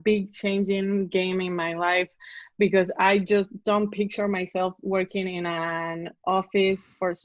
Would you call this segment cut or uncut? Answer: uncut